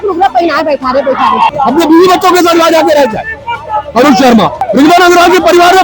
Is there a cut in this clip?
yes; 2 cuts; at 1.5 s, 4.6 s

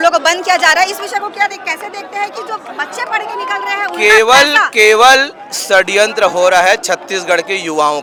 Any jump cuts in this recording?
no; 0 cuts

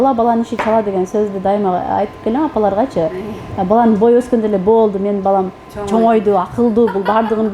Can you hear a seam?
no; 0 cuts

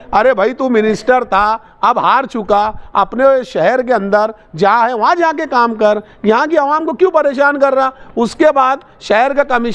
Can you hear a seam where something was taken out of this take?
no; 0 cuts

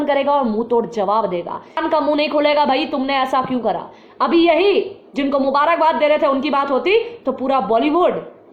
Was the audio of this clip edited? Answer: yes; 1 cut; at 1.8 s

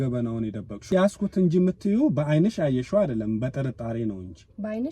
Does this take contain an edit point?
yes; 1 cut; at 0.9 s

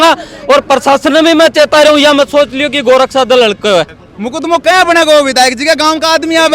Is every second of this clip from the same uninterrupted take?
no; 1 cut; at 4.0 s

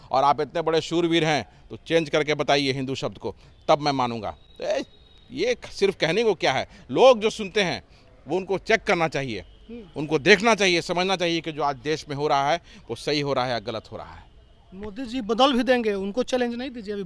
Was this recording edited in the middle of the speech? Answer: no; 0 cuts

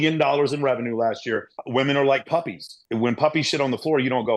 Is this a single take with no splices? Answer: no; 2 cuts; at 1.5 s, 2.8 s

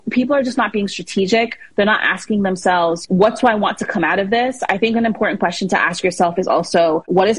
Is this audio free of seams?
no; 1 cut; at 3.0 s

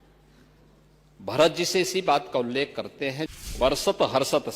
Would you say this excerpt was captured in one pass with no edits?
no; 1 cut; at 3.5 s

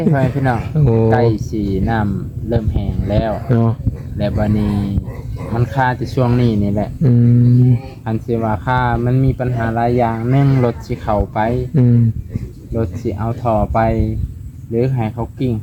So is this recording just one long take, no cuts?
yes; 0 cuts

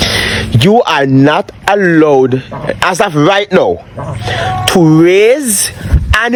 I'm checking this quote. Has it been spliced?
no; 0 cuts

